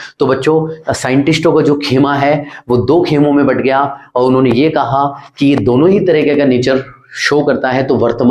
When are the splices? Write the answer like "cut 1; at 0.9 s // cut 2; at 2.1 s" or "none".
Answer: none